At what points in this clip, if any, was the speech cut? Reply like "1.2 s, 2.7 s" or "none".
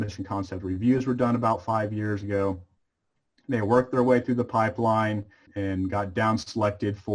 5.5 s